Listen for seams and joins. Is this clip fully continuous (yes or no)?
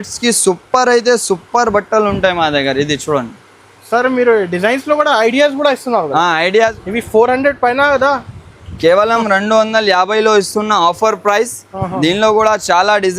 no